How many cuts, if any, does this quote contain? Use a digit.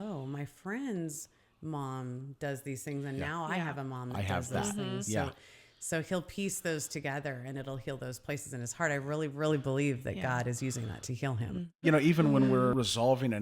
2